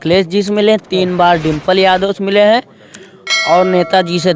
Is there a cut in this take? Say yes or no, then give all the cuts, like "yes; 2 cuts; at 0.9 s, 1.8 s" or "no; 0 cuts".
no; 0 cuts